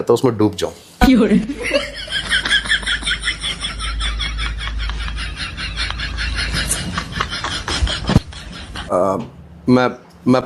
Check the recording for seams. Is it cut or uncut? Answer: uncut